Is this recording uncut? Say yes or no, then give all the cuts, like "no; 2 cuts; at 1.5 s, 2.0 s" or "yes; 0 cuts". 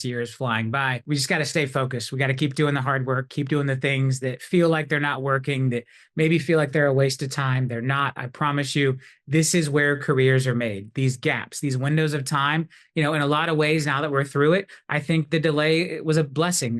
no; 1 cut; at 1.0 s